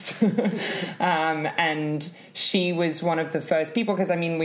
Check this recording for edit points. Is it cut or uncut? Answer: uncut